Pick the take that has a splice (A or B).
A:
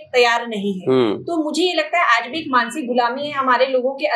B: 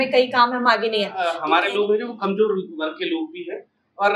B